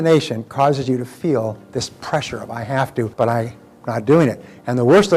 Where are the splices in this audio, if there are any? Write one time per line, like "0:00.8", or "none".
0:03.1